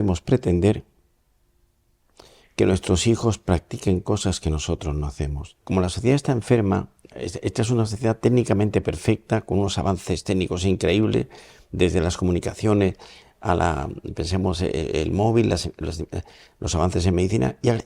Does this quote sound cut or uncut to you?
cut